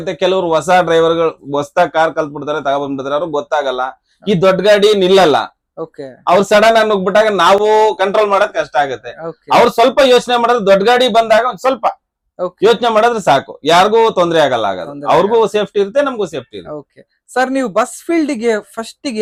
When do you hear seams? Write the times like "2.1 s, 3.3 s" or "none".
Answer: none